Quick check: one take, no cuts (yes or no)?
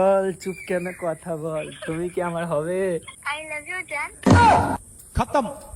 no